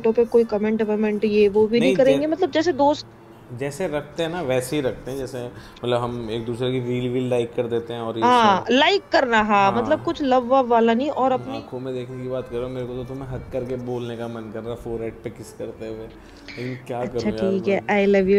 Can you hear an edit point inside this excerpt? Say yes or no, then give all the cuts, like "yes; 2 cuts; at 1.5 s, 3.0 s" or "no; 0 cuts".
yes; 1 cut; at 11.5 s